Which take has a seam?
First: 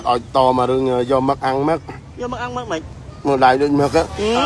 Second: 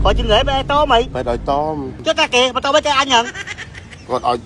second; 1 cut; at 1.1 s

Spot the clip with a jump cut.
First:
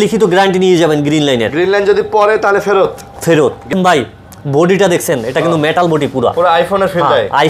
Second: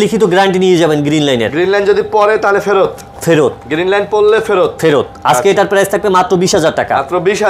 first; 1 cut; at 3.7 s

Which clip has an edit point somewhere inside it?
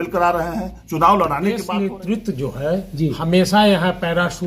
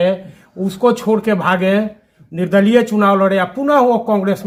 first; 1 cut; at 1.6 s

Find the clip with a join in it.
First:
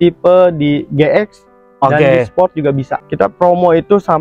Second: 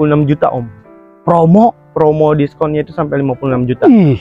first; 1 cut; at 2.9 s

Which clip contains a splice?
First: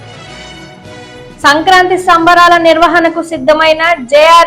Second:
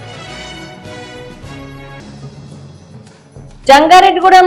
first; 1 cut; at 1.4 s

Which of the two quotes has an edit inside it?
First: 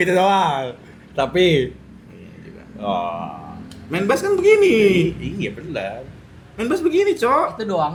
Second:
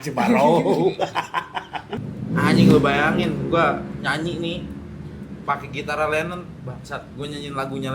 second; 1 cut; at 1.9 s

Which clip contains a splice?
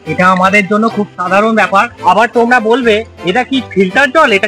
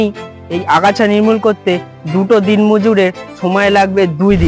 first; 1 cut; at 1.9 s

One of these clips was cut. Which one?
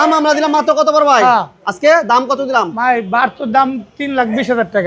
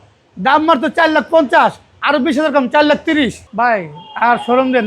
second; 1 cut; at 3.4 s

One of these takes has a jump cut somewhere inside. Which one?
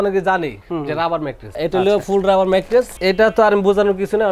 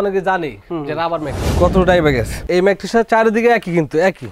second; 1 cut; at 1.4 s

